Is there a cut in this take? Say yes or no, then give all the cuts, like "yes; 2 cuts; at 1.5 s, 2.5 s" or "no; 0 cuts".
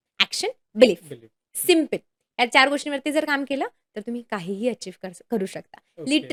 no; 0 cuts